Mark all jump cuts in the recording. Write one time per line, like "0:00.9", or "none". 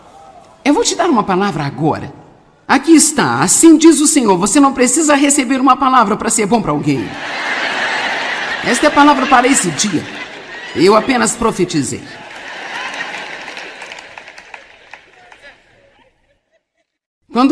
0:08.6